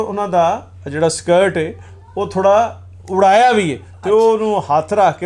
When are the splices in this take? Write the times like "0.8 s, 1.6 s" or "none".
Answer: none